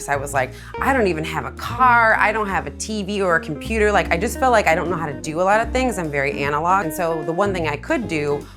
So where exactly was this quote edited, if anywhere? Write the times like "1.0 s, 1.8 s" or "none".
none